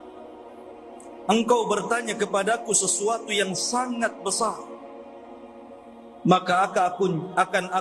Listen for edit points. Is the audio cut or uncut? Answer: cut